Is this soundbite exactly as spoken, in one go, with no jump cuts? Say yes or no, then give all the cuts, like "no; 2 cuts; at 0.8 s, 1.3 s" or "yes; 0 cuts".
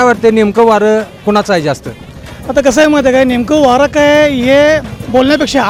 yes; 0 cuts